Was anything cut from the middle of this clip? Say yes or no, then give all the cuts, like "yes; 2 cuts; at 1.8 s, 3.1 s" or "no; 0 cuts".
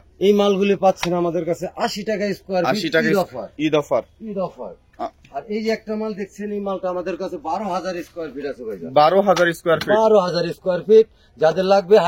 no; 0 cuts